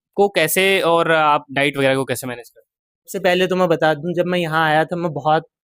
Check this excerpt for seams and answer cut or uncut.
uncut